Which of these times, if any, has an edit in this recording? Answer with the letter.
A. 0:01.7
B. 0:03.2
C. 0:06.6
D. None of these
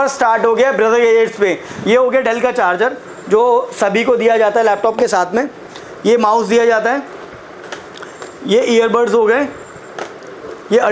A